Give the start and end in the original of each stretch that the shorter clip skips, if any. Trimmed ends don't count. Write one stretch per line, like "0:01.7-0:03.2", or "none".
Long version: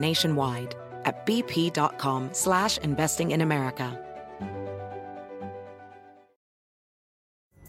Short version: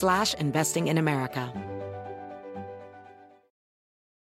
0:03.9-0:04.3